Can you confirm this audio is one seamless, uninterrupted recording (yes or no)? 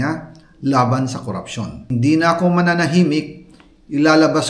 no